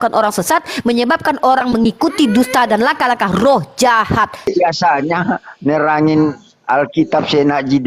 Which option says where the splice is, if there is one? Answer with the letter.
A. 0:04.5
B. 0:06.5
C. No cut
A